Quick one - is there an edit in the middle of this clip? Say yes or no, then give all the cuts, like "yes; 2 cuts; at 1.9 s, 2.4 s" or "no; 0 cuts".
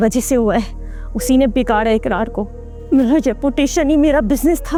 no; 0 cuts